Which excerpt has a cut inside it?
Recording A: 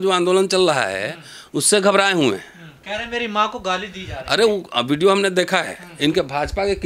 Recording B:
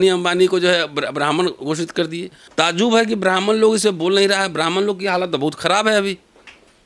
B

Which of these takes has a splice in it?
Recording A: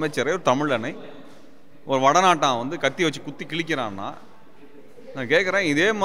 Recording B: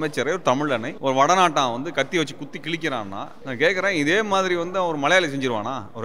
B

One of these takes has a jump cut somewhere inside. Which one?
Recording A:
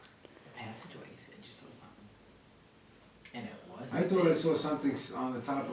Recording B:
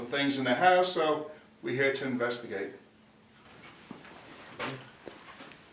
A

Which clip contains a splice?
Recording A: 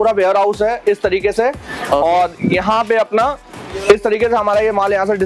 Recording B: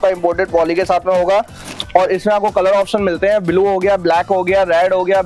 B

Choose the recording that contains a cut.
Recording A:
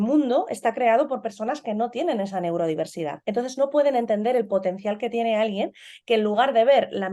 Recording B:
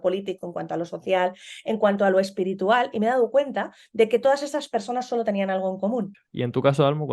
B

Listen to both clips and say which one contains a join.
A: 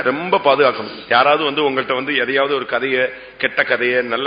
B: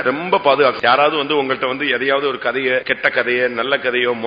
B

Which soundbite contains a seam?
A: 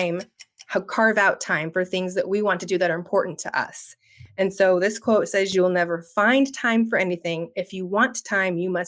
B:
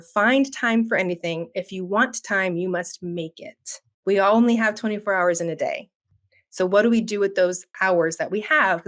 B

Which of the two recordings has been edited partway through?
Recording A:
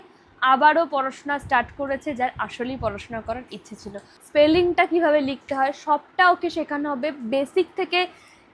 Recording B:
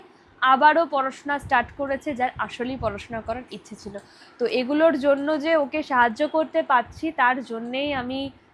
A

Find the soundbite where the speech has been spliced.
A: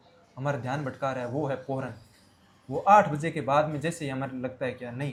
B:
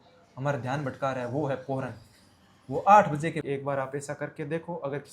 B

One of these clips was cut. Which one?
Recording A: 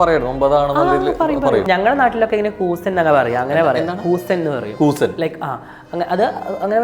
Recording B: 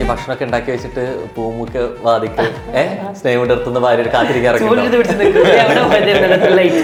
A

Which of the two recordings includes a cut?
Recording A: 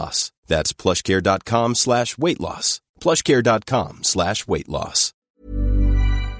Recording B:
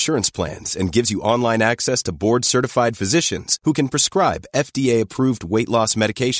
A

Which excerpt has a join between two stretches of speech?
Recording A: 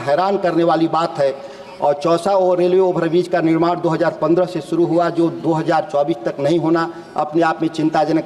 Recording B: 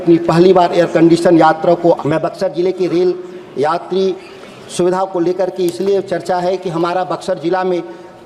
B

